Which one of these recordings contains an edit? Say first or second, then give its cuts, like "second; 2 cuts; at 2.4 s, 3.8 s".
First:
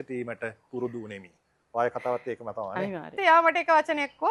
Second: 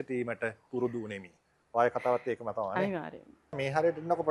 first; 1 cut; at 3.1 s